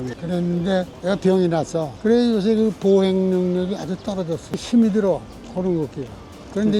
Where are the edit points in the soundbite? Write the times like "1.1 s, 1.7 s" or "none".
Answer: 1.9 s